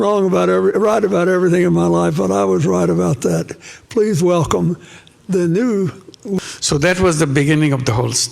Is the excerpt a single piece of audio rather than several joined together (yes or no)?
no